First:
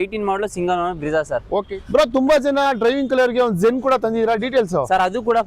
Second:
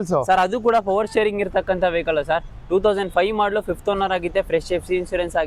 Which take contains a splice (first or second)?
first